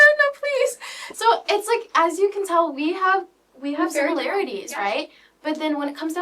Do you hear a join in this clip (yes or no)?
no